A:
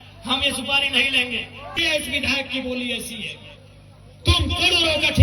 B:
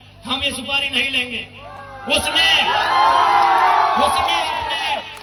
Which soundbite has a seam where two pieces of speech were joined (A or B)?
A